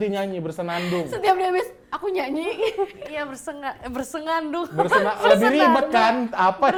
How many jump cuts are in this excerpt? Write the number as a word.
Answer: zero